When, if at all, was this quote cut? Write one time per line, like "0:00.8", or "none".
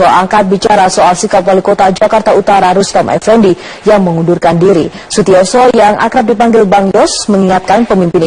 0:03.2